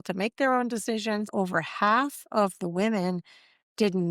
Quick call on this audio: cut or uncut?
cut